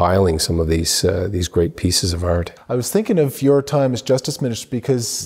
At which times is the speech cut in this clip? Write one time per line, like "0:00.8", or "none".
0:02.5